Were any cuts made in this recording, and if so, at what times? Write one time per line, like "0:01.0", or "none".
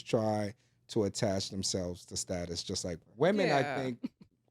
0:03.0